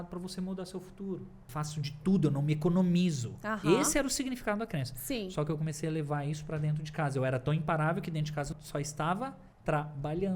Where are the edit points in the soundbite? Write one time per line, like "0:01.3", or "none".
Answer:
0:01.4
0:08.6
0:09.5

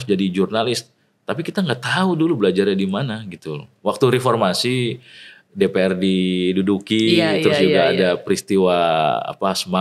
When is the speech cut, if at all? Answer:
none

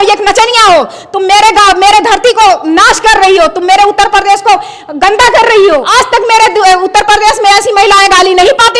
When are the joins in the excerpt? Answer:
none

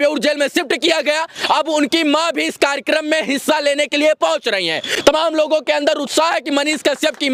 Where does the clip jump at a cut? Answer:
none

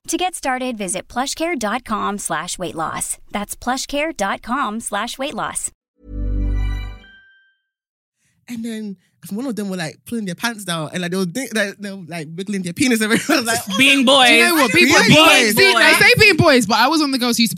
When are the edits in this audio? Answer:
0:05.7
0:08.0

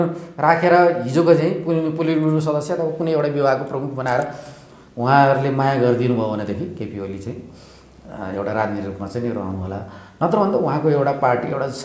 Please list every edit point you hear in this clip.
none

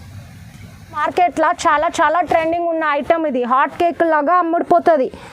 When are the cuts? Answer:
0:01.0

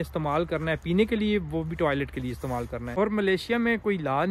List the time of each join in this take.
0:03.0

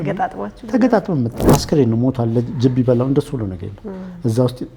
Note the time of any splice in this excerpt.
0:01.4

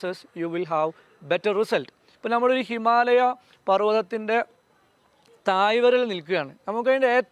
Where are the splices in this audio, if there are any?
0:02.1

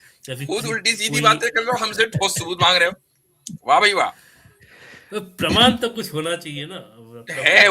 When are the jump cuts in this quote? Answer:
none

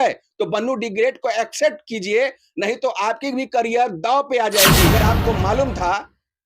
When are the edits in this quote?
0:04.9

